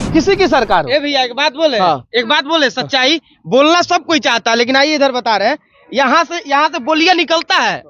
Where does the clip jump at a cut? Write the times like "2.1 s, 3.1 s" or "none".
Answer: none